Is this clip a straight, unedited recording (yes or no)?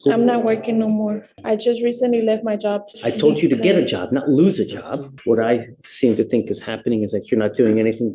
no